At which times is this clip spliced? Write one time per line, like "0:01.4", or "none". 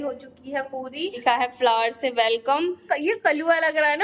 0:01.2
0:02.8